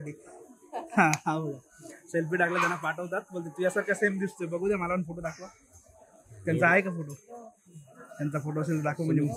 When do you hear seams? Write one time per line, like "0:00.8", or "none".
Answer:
none